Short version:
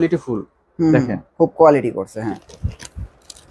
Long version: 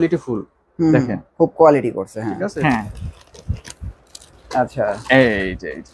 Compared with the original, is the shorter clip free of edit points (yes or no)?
no